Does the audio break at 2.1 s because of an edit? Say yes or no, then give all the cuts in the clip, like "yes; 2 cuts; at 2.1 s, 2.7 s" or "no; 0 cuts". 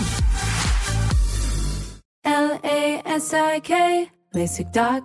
yes; 1 cut; at 2.1 s